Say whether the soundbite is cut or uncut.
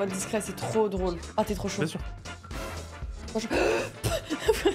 cut